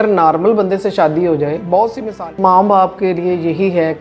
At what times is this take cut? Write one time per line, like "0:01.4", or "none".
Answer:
0:02.3